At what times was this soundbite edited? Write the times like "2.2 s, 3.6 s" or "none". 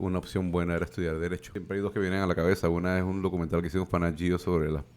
1.5 s